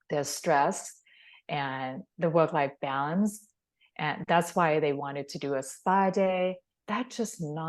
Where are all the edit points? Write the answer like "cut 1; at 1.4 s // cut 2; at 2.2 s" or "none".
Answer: cut 1; at 6.7 s